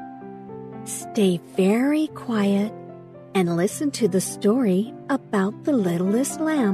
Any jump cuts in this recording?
yes; 1 cut; at 1.1 s

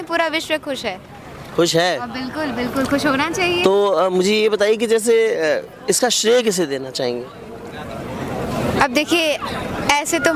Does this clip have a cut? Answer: no; 0 cuts

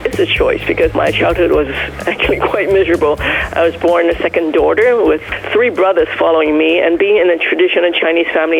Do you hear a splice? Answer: yes; 1 cut; at 0.9 s

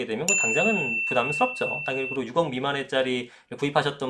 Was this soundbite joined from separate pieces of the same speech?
no; 0 cuts

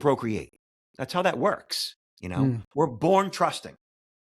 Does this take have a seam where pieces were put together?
no; 0 cuts

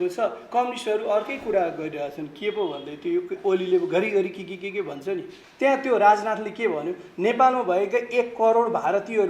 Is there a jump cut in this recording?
yes; 1 cut; at 5.4 s

